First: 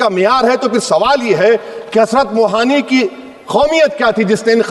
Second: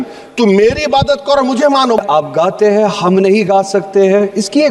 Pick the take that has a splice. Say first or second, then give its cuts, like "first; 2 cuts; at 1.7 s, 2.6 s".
second; 1 cut; at 2.0 s